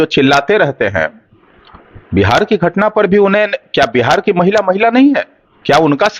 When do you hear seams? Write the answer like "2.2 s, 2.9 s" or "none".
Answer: none